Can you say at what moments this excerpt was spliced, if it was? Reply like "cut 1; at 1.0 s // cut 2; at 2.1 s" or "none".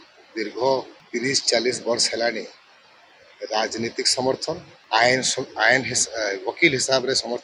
cut 1; at 1.0 s // cut 2; at 4.7 s